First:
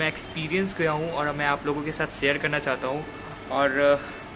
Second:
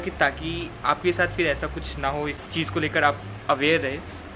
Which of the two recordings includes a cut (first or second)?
second